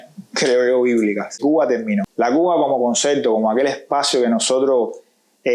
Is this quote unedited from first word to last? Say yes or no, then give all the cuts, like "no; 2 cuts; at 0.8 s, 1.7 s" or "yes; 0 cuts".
no; 1 cut; at 1.5 s